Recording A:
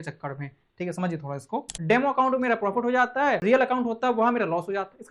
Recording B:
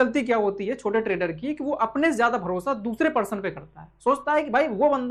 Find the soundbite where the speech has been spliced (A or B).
A